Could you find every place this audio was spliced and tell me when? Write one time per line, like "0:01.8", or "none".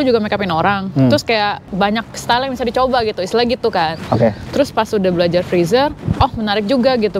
0:01.7